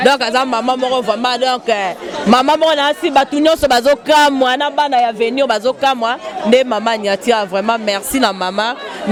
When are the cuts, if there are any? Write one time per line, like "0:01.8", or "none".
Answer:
none